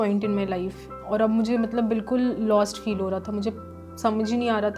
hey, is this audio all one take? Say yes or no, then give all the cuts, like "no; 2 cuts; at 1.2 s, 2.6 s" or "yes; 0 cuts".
yes; 0 cuts